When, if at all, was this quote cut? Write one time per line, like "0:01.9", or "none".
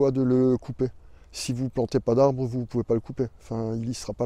none